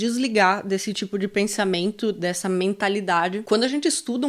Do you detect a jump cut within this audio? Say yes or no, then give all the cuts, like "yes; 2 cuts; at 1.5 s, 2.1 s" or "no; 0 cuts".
yes; 1 cut; at 3.4 s